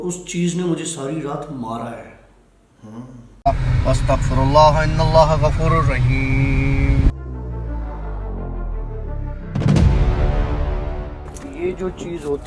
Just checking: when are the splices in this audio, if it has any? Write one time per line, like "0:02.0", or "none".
0:03.4